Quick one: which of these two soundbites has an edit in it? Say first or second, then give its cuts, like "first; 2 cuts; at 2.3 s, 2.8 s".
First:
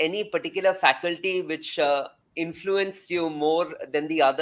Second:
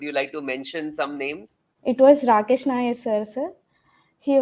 second; 1 cut; at 1.7 s